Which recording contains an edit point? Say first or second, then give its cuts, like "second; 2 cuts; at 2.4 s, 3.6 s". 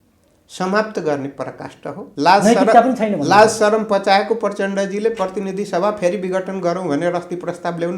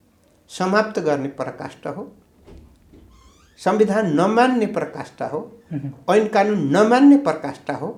first; 1 cut; at 2.0 s